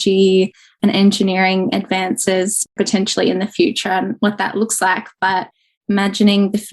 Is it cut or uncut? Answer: cut